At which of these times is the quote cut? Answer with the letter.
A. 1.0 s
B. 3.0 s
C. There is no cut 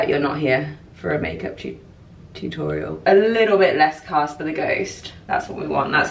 B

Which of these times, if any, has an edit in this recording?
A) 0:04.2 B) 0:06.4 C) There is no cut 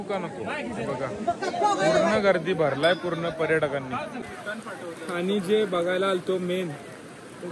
A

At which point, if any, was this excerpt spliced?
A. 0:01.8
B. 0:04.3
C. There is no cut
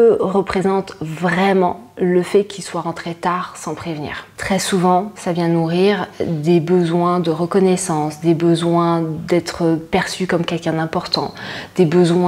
B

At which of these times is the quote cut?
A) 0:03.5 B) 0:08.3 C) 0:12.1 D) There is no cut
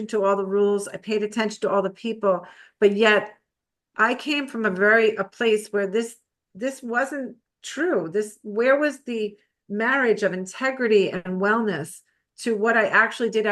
D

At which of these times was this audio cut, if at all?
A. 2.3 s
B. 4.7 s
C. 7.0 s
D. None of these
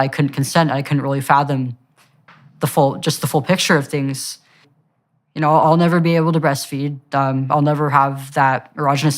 B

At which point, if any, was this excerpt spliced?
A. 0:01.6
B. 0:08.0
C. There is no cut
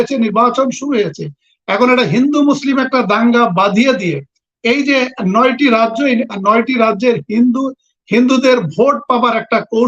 C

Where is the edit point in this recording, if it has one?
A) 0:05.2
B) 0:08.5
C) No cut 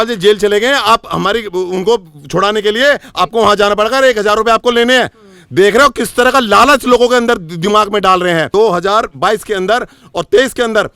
B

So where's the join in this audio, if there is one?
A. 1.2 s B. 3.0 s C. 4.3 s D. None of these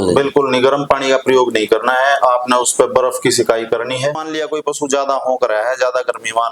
C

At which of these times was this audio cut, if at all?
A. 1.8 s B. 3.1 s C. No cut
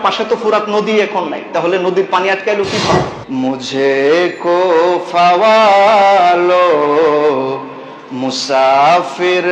B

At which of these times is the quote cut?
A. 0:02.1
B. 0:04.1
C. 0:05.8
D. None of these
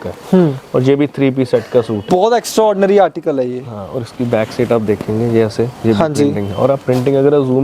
A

